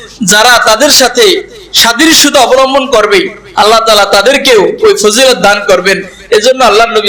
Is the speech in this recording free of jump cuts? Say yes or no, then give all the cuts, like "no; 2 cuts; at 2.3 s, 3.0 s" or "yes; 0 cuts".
yes; 0 cuts